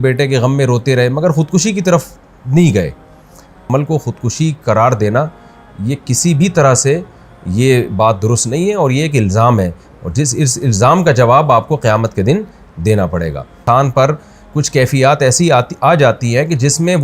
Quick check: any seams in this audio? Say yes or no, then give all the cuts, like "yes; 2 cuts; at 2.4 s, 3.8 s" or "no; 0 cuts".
yes; 2 cuts; at 3.6 s, 13.6 s